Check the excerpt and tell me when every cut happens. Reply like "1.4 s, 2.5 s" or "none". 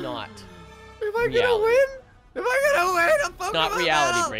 none

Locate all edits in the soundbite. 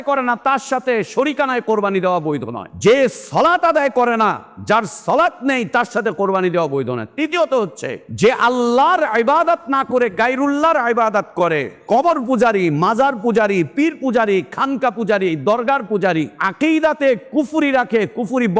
2.6 s, 8.0 s, 16.4 s

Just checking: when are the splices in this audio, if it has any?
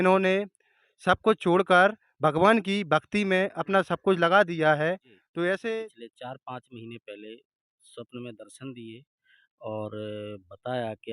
5.8 s

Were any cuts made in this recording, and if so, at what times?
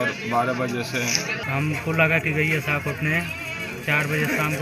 1.4 s

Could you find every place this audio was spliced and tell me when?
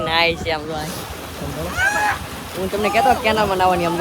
none

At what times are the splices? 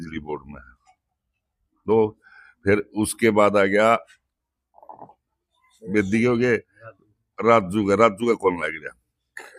none

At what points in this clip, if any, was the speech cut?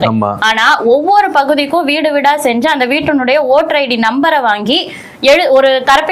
none

